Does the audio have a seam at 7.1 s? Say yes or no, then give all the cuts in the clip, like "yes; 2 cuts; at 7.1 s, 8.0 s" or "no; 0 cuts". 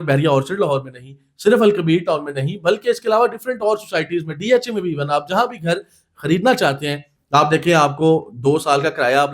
yes; 1 cut; at 7.1 s